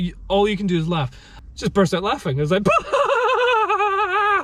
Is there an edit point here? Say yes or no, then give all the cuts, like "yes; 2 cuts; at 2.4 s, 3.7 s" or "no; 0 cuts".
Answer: yes; 1 cut; at 1.3 s